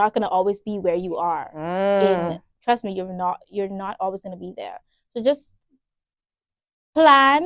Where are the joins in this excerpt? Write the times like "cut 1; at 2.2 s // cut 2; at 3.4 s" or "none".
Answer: none